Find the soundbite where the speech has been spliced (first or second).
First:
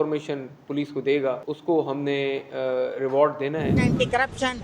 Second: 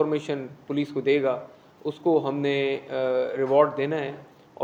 first